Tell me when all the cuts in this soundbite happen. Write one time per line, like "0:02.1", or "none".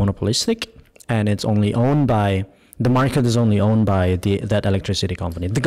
none

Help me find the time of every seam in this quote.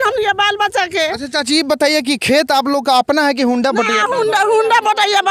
none

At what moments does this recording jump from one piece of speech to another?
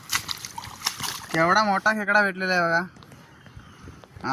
none

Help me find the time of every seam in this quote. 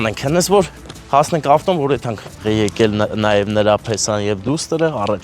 0:02.4

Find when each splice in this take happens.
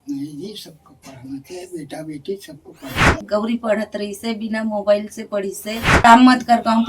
0:03.2
0:06.0

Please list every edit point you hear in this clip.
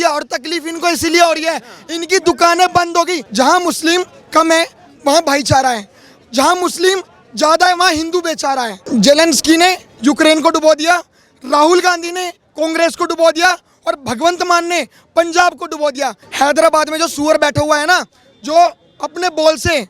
0:03.2
0:08.8
0:16.2

